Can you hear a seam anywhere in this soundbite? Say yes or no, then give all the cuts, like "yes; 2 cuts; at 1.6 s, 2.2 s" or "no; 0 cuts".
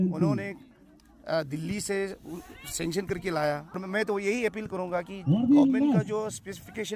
yes; 1 cut; at 3.8 s